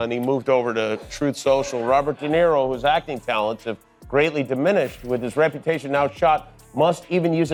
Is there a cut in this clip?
no; 0 cuts

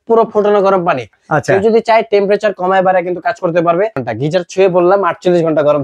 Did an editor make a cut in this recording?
yes; 2 cuts; at 1.2 s, 4.0 s

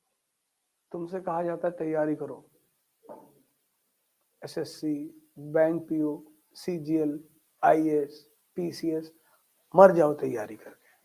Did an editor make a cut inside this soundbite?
no; 0 cuts

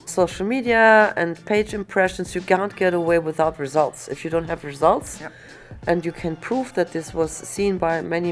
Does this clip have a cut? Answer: no; 0 cuts

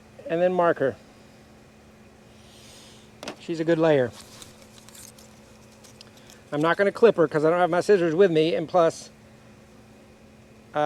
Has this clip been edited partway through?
no; 0 cuts

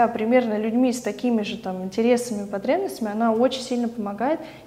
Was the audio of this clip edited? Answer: no; 0 cuts

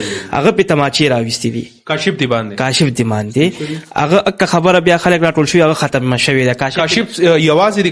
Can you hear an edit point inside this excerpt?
no; 0 cuts

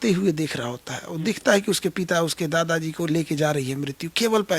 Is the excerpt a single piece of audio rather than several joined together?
yes; 0 cuts

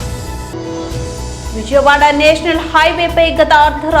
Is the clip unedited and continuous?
no; 1 cut; at 1.1 s

